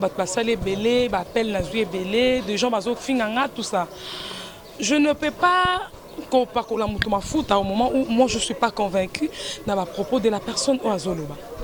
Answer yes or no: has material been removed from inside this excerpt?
no